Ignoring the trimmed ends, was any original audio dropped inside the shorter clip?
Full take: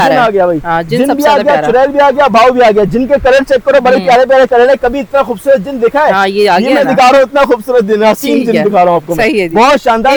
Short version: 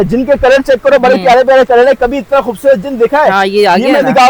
no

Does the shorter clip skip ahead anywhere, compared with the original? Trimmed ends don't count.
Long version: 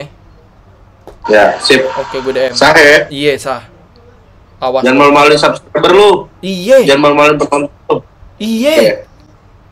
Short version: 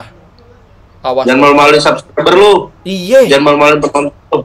no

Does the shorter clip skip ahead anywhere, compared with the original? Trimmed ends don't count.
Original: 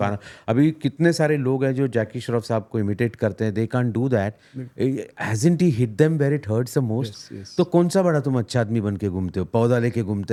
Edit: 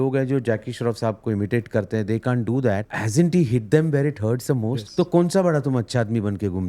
yes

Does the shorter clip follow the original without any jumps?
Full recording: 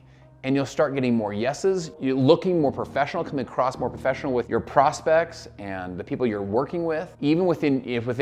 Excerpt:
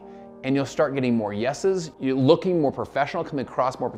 yes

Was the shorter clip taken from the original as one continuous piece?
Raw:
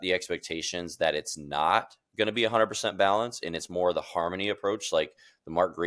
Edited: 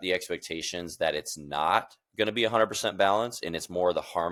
yes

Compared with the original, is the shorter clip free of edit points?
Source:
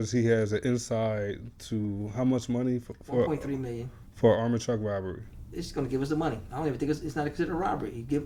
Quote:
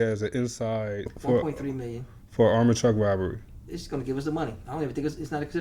no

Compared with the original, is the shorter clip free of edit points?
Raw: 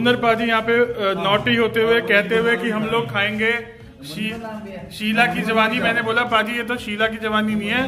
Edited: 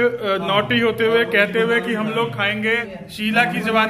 no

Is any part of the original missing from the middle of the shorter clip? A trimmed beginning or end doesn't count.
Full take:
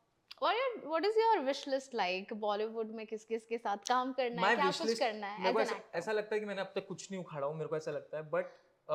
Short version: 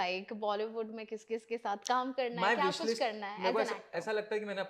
no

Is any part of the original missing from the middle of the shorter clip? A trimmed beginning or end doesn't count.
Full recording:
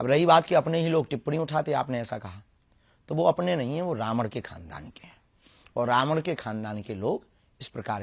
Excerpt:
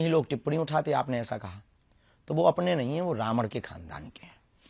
no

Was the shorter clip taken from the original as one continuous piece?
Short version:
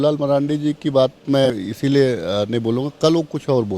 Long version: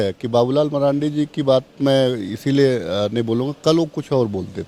no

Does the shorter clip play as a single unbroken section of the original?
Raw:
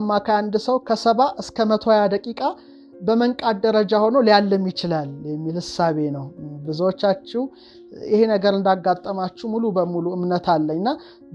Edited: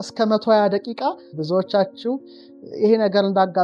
no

